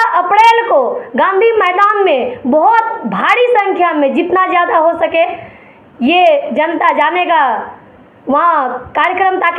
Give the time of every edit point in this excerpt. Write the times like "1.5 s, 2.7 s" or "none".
none